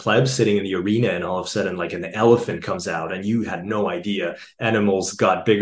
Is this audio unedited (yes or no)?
yes